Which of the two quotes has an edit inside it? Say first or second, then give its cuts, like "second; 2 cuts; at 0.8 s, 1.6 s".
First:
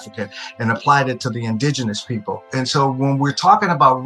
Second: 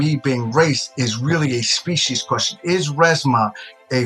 first; 1 cut; at 2.5 s